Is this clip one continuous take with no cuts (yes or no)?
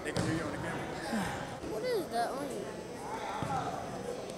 no